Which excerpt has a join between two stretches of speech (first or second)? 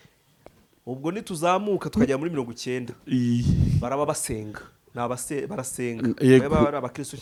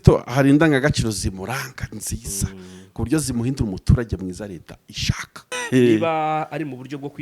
second